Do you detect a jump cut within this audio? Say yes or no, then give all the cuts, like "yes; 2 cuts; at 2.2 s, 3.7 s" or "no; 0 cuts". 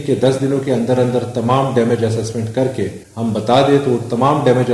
yes; 1 cut; at 3.0 s